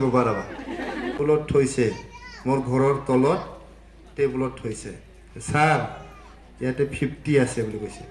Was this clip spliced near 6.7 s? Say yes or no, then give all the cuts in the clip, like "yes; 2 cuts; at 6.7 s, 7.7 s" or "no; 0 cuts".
no; 1 cut; at 1.2 s